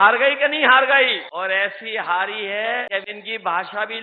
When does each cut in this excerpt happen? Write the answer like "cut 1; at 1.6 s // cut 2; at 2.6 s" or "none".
cut 1; at 1.2 s // cut 2; at 2.9 s